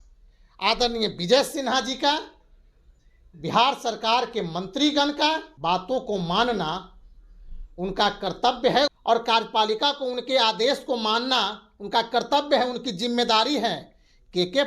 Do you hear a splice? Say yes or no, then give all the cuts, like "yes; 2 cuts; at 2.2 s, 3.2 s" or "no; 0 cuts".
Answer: yes; 2 cuts; at 5.5 s, 8.9 s